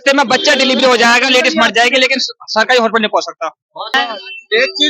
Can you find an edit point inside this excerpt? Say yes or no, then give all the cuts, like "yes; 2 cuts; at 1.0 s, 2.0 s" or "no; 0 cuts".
yes; 1 cut; at 3.9 s